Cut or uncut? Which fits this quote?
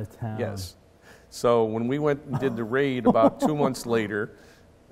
uncut